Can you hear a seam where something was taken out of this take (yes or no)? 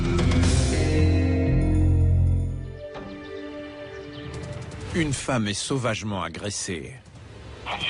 yes